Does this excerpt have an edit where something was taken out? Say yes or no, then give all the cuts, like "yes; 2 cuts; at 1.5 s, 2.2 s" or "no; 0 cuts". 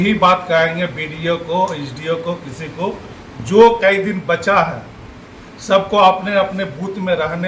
no; 0 cuts